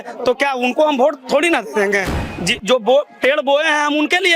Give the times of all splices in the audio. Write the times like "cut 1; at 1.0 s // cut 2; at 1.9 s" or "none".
cut 1; at 2.2 s